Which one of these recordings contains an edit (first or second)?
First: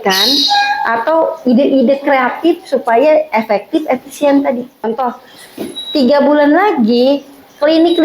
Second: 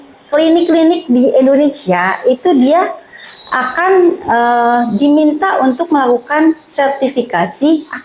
first